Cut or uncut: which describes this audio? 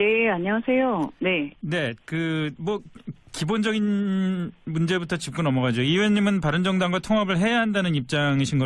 cut